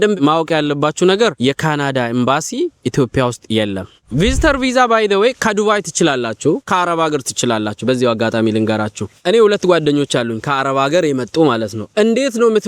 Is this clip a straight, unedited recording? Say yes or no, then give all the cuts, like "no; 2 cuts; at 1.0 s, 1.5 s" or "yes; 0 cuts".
no; 1 cut; at 4.0 s